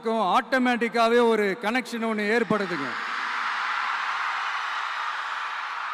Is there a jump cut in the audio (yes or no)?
no